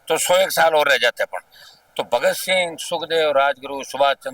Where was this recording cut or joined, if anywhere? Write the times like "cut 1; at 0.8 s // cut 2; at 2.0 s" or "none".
none